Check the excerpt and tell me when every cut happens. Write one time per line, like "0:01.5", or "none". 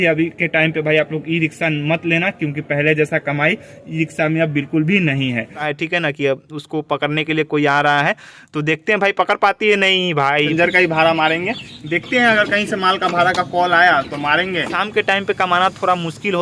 0:05.6
0:10.5
0:14.7